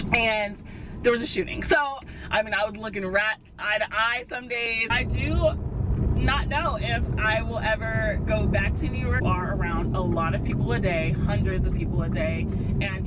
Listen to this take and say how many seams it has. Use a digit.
3